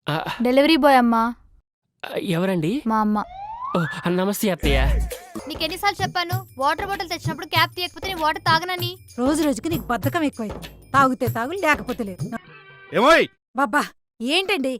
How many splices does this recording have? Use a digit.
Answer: 2